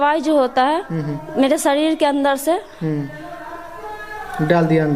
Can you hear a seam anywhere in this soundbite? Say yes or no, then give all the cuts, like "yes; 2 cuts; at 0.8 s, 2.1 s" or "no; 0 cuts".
no; 0 cuts